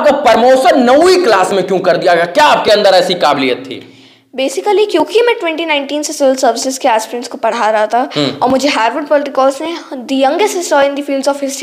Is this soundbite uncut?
yes; 0 cuts

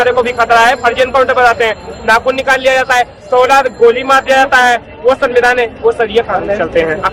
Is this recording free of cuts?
yes; 0 cuts

